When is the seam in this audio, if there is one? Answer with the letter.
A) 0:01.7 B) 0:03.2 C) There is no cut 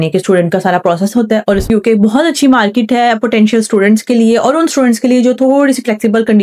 A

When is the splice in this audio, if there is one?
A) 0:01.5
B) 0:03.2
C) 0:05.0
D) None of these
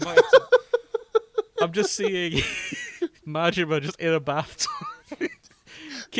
B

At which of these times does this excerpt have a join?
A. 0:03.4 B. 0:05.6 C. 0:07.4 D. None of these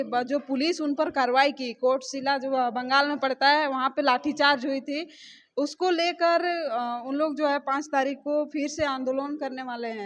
D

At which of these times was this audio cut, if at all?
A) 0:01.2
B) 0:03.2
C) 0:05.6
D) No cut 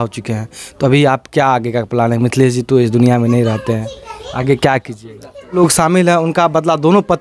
C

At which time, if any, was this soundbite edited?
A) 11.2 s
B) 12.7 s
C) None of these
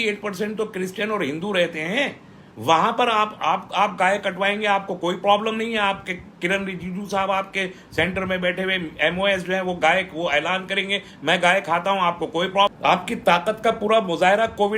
B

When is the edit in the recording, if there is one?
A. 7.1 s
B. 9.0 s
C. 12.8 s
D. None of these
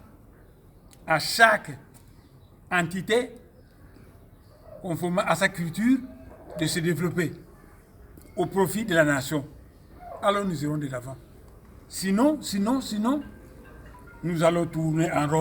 D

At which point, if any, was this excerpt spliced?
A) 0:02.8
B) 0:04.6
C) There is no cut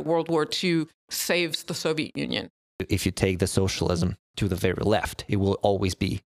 A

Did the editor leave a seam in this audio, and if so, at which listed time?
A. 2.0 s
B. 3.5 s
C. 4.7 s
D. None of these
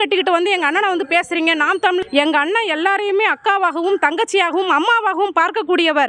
A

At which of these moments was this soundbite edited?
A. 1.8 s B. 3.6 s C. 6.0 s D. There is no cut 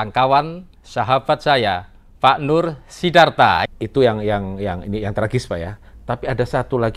B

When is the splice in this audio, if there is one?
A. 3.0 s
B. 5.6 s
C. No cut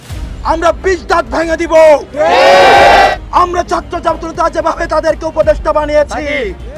A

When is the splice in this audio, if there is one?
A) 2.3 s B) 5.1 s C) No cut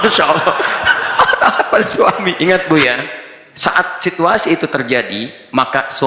A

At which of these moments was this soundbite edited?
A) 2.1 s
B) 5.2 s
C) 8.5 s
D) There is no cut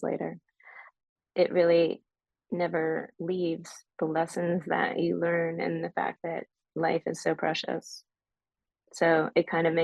D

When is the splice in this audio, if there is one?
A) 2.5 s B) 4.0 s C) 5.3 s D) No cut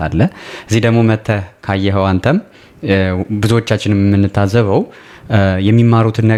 D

